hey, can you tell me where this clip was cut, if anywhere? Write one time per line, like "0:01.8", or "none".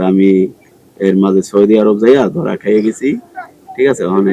none